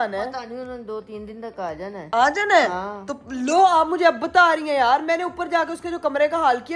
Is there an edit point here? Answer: no; 0 cuts

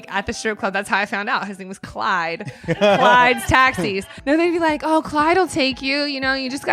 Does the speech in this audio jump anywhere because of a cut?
yes; 1 cut; at 4.1 s

